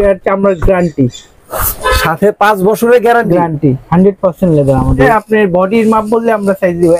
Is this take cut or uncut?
cut